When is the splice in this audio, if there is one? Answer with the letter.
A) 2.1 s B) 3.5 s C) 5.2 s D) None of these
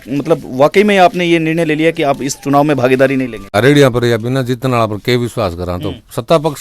B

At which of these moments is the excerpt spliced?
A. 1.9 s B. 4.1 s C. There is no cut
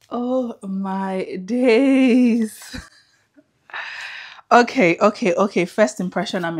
C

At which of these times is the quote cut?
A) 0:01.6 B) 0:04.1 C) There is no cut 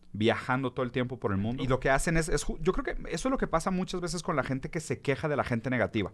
A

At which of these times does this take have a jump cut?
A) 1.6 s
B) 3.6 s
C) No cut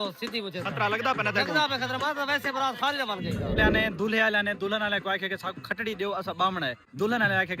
B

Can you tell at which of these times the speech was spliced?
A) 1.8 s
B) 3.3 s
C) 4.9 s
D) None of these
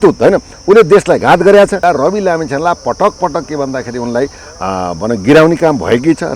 A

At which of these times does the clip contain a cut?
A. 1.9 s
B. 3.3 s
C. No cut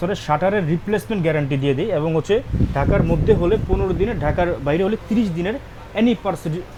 C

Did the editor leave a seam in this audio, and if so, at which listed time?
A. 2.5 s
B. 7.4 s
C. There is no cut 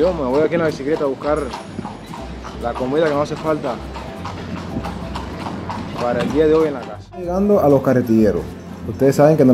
B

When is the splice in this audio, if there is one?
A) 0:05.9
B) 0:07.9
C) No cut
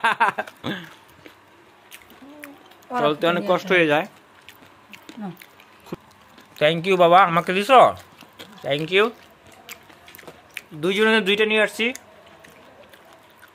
A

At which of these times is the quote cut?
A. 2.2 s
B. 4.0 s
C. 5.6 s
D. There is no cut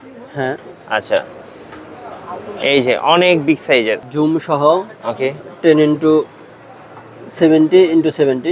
B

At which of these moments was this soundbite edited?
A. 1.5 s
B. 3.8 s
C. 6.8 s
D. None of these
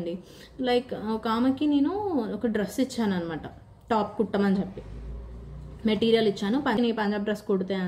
C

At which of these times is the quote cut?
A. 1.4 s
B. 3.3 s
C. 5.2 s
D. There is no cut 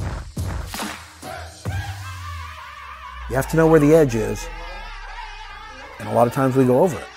A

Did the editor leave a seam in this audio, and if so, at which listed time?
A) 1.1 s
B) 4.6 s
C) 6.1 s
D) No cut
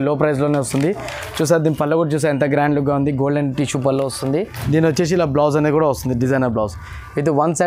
B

